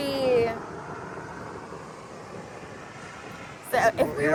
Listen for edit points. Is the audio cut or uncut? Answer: uncut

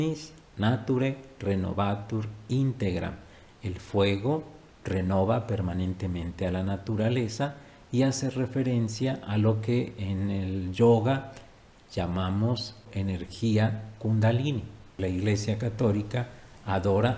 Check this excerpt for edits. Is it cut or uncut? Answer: cut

